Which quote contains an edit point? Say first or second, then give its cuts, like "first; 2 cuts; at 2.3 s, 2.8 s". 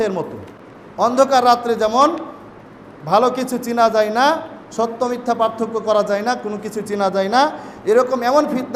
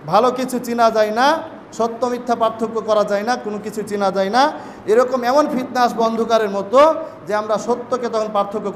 first; 1 cut; at 1.1 s